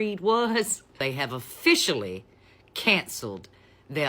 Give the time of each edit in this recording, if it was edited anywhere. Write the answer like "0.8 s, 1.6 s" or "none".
1.0 s